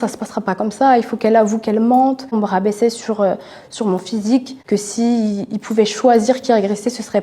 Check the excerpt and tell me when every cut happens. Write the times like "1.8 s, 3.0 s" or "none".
2.3 s, 4.6 s